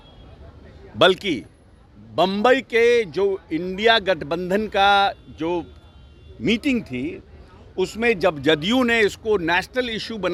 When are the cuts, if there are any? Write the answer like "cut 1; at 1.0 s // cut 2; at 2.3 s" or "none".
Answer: none